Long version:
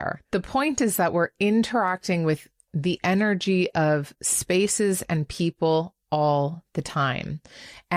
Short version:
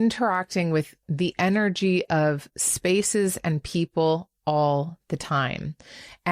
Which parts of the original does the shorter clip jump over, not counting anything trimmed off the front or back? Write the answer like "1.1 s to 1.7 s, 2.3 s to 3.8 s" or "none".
2.5 s to 2.6 s